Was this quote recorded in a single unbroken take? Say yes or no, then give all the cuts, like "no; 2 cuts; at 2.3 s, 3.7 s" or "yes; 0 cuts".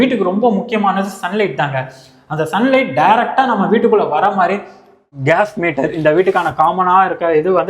no; 1 cut; at 5.2 s